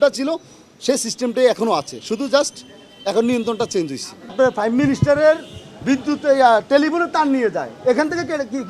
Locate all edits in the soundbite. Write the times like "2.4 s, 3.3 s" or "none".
4.3 s